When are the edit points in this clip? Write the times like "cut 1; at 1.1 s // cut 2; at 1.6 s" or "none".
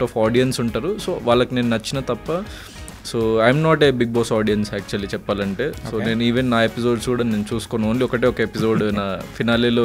none